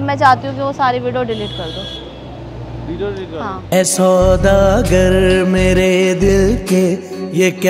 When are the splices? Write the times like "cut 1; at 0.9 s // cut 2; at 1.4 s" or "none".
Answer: none